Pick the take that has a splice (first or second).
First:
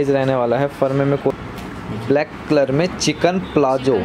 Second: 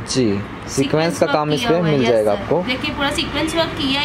first